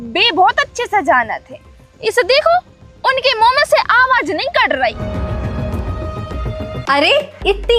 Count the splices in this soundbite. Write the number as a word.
one